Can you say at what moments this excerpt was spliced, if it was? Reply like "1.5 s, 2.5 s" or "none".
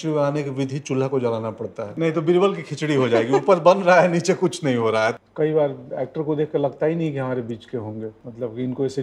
1.9 s, 5.2 s